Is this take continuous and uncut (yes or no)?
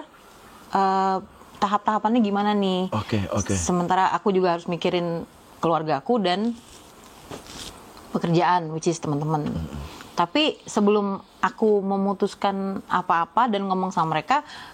yes